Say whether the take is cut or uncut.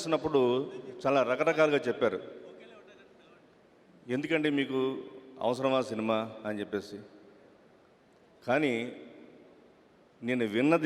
uncut